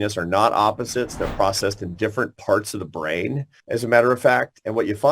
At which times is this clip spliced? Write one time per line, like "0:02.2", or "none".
0:03.5